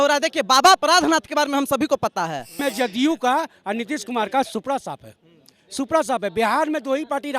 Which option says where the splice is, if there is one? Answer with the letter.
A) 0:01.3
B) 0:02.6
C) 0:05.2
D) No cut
B